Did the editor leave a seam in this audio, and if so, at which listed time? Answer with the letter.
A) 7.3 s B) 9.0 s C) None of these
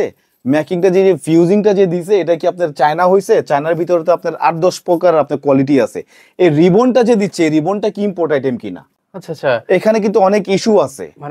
C